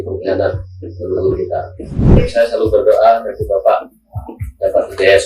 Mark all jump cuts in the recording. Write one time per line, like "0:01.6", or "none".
0:02.1